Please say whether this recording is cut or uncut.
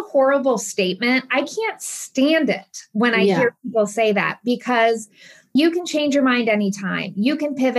uncut